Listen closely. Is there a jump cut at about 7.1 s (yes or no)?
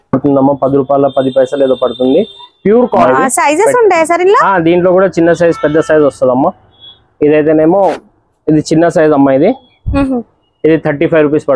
no